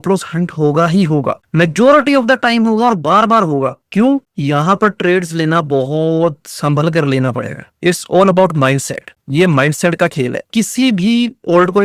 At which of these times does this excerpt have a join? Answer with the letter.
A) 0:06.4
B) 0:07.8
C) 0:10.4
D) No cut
C